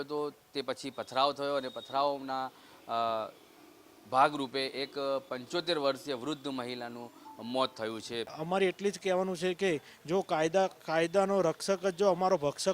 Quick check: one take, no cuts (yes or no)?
no